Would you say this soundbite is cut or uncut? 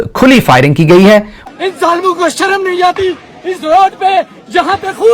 cut